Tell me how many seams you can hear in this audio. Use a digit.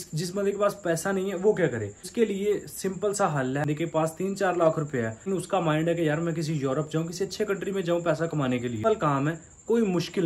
4